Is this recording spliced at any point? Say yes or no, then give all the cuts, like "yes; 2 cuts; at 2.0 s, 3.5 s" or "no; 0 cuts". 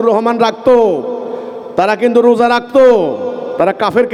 no; 0 cuts